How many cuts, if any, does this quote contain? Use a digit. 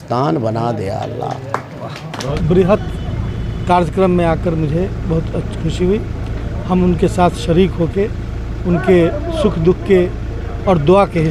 1